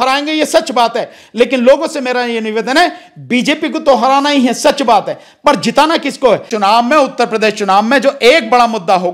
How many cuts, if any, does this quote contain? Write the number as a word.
one